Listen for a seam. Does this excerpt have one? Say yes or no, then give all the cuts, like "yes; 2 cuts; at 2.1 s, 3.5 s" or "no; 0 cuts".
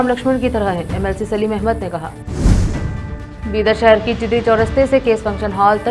no; 0 cuts